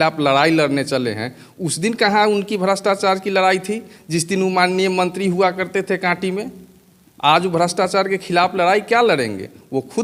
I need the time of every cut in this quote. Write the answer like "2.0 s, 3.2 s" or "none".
none